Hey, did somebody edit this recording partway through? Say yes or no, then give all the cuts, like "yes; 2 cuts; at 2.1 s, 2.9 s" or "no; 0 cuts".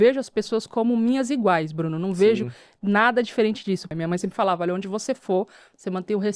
yes; 1 cut; at 3.9 s